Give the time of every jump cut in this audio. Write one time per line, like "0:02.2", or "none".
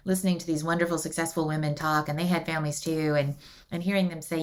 none

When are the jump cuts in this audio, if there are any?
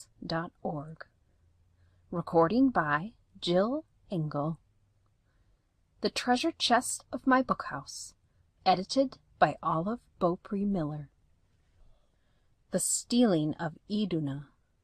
0:09.3

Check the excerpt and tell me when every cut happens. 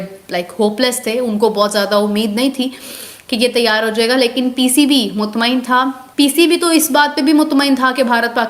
0:06.0

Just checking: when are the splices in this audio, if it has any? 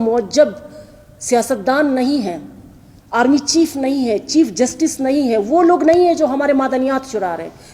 none

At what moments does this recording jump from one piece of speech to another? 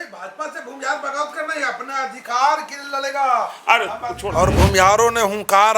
0:04.1

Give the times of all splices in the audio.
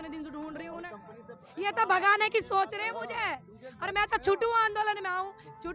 0:01.4

